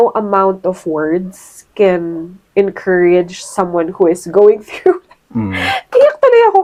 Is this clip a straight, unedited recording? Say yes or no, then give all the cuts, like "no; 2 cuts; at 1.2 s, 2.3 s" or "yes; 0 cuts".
yes; 0 cuts